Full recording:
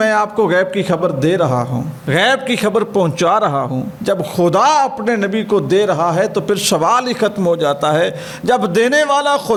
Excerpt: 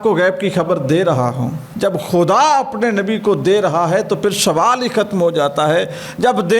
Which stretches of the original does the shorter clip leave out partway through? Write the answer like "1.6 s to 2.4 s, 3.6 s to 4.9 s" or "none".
2.0 s to 3.9 s